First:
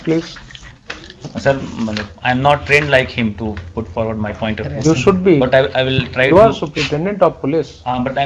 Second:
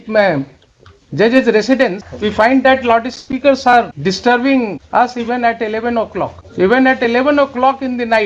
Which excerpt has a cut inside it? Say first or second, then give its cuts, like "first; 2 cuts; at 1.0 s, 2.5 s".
second; 4 cuts; at 2.1 s, 3.9 s, 4.8 s, 6.4 s